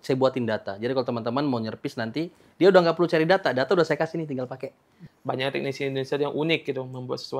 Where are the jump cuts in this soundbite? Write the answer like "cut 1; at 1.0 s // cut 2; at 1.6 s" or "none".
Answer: cut 1; at 5.1 s